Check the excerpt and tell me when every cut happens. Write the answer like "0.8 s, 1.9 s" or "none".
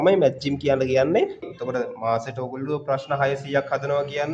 1.5 s